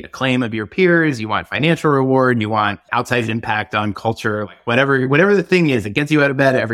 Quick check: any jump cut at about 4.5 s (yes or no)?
no